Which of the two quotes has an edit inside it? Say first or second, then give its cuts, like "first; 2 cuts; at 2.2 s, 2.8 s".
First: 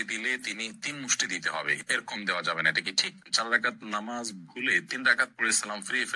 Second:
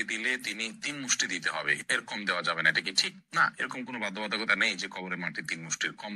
first; 1 cut; at 3.2 s